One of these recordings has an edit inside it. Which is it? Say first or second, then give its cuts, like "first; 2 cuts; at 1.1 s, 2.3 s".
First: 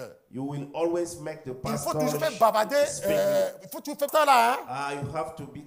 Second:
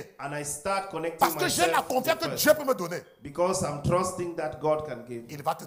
first; 1 cut; at 4.1 s